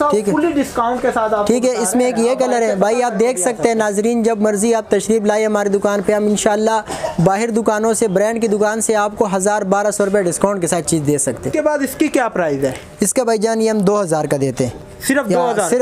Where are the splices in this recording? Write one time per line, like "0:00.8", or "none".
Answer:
0:11.5